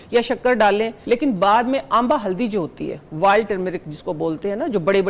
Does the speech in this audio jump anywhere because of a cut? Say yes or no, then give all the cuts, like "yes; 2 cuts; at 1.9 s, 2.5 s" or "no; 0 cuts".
yes; 1 cut; at 1.0 s